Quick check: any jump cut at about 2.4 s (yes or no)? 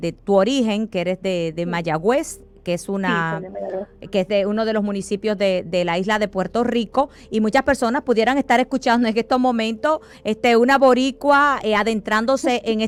no